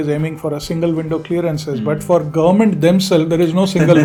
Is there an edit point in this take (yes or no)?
no